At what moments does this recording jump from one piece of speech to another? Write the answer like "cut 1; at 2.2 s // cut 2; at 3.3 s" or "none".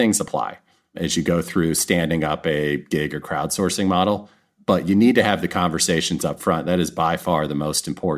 cut 1; at 1.0 s

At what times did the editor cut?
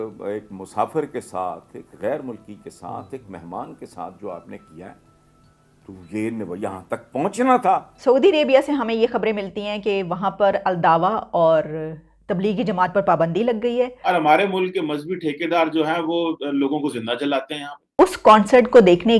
cut 1; at 7.9 s // cut 2; at 13.9 s // cut 3; at 17.9 s

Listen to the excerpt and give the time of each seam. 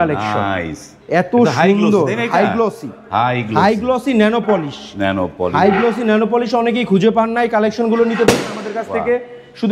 none

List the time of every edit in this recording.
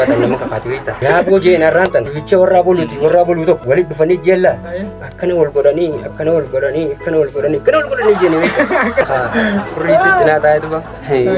cut 1; at 1.0 s // cut 2; at 2.1 s // cut 3; at 3.6 s // cut 4; at 9.0 s

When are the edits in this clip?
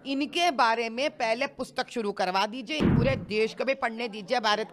cut 1; at 2.9 s

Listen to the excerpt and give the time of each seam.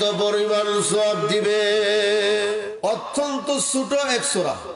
cut 1; at 2.6 s

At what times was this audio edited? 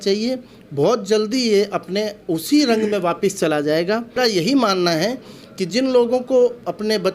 cut 1; at 4.2 s

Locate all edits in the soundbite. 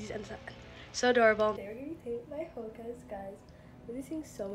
cut 1; at 1.6 s

